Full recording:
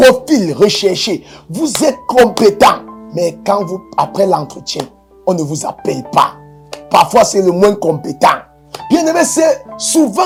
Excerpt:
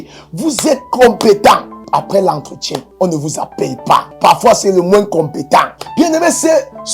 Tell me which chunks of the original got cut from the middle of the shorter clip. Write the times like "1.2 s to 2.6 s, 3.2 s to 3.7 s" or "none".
2.9 s to 3.8 s, 4.9 s to 5.1 s, 6.4 s to 6.8 s, 8.5 s to 8.7 s